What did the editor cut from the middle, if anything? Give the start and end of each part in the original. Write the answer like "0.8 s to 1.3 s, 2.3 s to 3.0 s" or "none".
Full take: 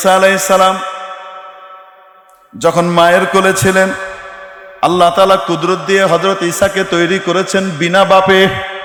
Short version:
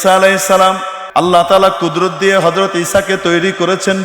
0.9 s to 4.6 s